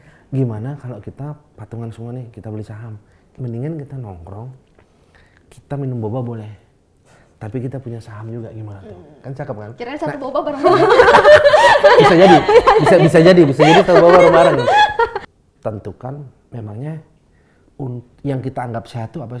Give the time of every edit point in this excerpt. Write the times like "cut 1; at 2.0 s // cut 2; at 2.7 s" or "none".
cut 1; at 3.2 s // cut 2; at 15.2 s